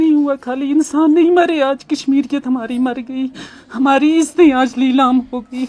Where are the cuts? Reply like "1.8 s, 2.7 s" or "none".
none